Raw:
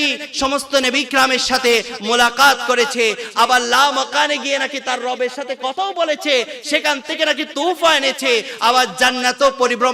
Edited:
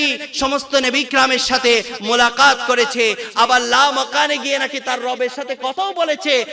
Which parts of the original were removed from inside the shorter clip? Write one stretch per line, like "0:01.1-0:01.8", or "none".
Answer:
none